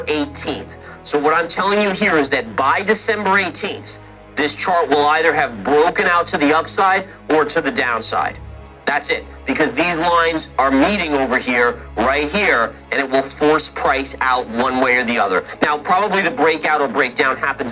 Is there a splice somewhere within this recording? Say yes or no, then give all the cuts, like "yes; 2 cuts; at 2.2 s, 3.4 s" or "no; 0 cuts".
no; 0 cuts